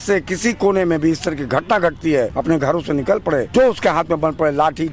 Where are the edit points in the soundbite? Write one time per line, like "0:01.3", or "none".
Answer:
0:02.3
0:03.5